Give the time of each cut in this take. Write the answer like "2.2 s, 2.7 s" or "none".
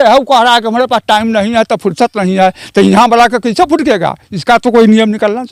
none